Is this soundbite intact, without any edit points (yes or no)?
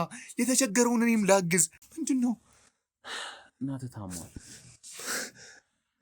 no